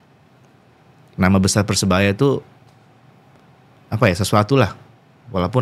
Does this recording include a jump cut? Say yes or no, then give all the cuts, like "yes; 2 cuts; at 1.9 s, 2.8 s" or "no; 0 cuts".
no; 0 cuts